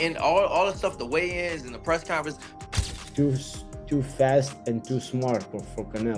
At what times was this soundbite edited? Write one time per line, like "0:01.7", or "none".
0:02.5